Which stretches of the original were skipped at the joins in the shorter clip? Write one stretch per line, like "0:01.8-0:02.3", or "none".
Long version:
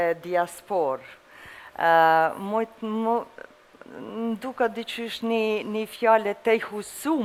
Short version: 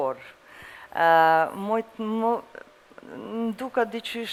none